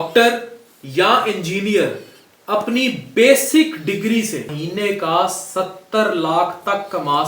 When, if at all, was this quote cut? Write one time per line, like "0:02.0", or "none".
0:04.5